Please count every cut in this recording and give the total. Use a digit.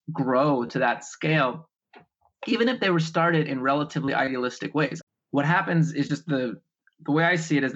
1